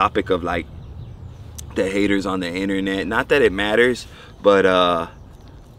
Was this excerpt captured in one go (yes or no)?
yes